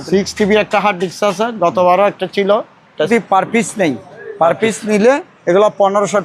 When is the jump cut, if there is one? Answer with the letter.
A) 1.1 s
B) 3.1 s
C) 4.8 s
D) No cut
B